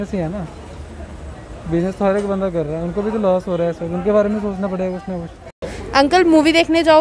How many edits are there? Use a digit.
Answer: 1